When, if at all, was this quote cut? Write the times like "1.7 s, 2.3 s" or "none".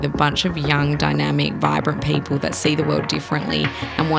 none